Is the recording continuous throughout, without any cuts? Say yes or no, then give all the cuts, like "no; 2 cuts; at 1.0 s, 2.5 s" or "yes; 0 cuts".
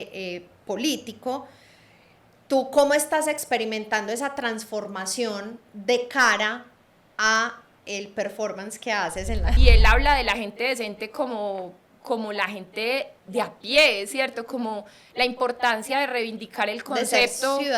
no; 1 cut; at 9.5 s